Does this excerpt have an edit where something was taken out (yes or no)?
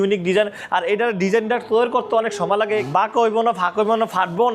yes